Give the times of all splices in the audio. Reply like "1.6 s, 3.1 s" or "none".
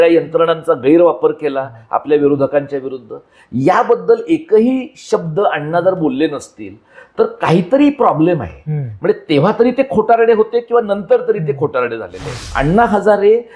12.4 s

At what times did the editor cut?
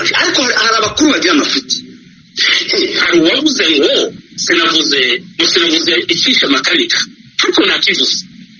3.0 s

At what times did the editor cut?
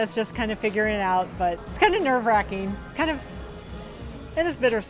1.7 s

